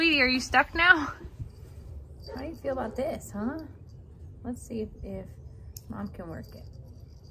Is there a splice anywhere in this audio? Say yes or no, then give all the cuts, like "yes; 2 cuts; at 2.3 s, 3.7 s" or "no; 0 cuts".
yes; 1 cut; at 1.4 s